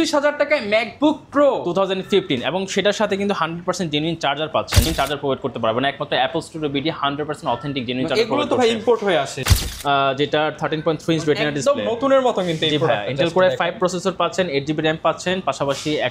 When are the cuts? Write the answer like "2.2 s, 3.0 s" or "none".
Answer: 4.9 s, 9.4 s